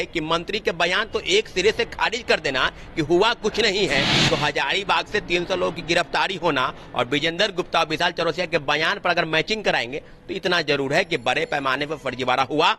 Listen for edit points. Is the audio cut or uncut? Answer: uncut